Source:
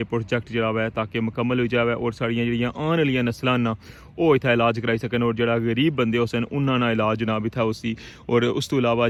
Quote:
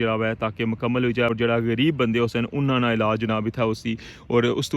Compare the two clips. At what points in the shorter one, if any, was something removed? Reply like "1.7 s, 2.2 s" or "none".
1.3 s